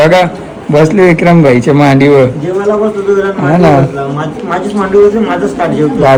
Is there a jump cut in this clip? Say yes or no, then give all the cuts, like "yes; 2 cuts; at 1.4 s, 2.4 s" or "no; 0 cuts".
no; 0 cuts